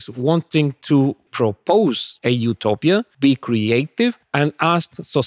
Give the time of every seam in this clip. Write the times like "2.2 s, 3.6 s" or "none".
1.3 s, 2.1 s, 3.1 s, 4.2 s